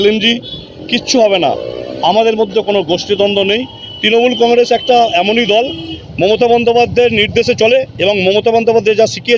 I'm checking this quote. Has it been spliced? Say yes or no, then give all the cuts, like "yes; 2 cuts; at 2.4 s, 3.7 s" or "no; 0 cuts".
no; 0 cuts